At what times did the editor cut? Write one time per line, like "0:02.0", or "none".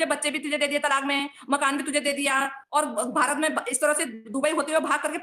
none